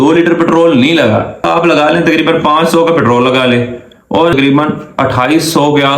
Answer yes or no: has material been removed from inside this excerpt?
yes